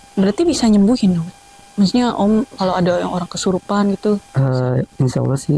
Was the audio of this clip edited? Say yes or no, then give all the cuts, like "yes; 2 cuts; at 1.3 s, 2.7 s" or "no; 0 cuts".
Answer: no; 0 cuts